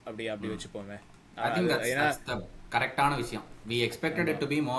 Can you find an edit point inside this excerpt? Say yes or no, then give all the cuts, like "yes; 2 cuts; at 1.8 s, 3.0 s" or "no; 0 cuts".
no; 0 cuts